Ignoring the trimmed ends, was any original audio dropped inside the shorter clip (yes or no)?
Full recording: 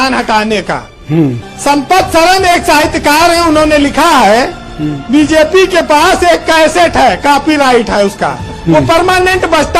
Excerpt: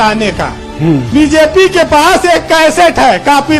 yes